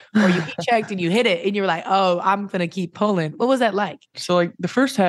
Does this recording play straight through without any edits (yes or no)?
no